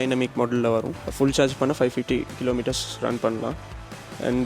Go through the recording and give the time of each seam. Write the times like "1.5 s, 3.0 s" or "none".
1.0 s

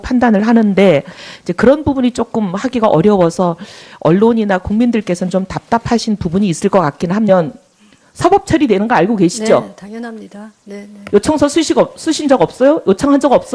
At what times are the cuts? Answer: none

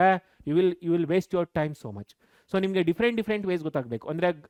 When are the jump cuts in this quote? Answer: none

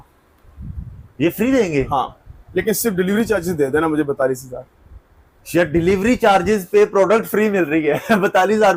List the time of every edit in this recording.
none

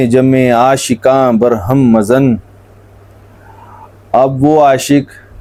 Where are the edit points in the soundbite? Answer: none

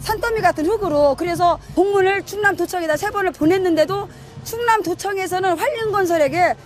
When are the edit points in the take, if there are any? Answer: 1.0 s

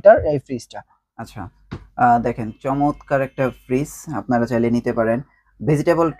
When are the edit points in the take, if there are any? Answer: none

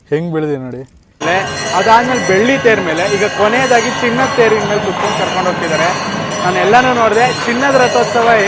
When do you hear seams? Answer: 1.2 s

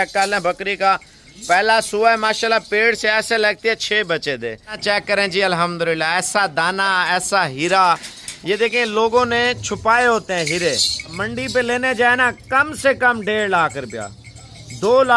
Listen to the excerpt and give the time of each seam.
4.8 s, 11.2 s

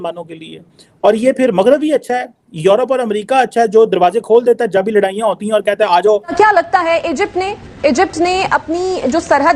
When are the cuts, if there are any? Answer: 6.3 s

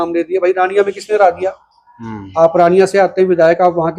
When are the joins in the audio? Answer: none

